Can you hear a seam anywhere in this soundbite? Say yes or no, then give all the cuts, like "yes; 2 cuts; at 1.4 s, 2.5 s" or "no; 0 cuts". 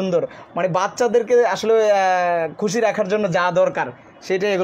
no; 0 cuts